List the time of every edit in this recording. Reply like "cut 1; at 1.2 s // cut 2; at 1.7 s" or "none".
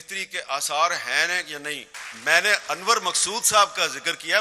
cut 1; at 1.8 s